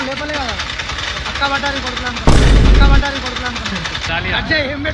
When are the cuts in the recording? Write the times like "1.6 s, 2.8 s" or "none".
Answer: 4.1 s